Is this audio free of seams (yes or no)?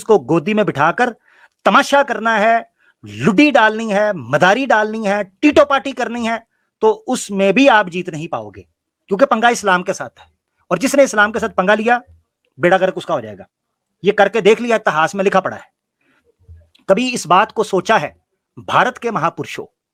yes